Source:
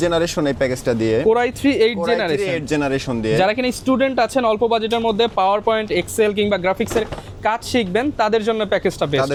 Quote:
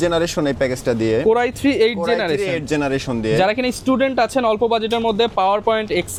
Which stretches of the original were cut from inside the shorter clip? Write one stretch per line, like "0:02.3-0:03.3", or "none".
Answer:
none